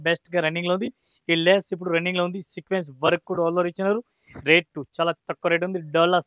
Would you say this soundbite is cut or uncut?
uncut